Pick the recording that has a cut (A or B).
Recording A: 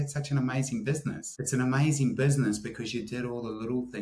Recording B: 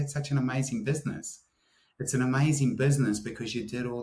A